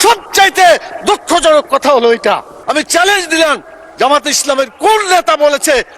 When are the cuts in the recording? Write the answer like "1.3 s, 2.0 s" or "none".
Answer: 2.5 s